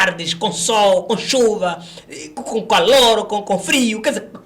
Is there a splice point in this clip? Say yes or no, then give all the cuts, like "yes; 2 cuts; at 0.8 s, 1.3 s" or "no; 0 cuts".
no; 0 cuts